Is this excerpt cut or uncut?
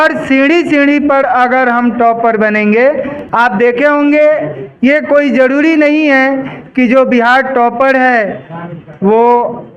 cut